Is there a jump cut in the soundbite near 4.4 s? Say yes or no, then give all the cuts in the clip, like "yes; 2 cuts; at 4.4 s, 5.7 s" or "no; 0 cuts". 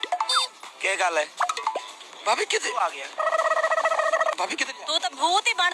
yes; 1 cut; at 4.4 s